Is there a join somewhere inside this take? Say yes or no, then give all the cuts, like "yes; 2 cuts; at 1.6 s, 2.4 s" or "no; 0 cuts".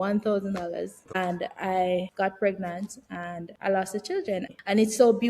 yes; 4 cuts; at 1.0 s, 2.1 s, 3.5 s, 4.5 s